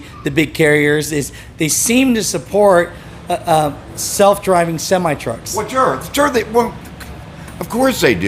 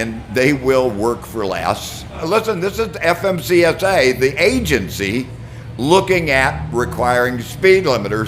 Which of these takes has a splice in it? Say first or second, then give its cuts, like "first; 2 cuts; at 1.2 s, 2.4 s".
second; 1 cut; at 2.2 s